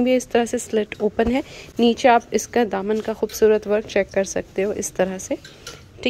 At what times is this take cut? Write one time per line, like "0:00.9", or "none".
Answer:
none